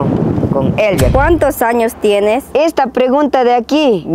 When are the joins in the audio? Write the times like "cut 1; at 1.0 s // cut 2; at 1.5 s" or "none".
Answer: cut 1; at 1.1 s // cut 2; at 2.4 s